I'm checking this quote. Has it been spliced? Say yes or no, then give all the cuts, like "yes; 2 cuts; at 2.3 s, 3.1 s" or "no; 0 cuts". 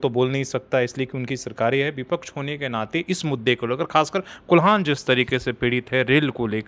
no; 0 cuts